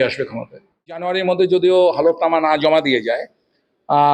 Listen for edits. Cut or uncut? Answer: cut